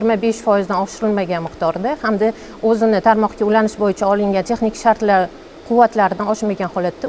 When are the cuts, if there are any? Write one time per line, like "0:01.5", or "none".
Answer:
none